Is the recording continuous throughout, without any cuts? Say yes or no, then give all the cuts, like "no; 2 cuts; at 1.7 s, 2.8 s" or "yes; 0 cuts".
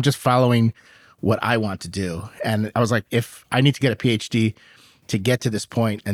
yes; 0 cuts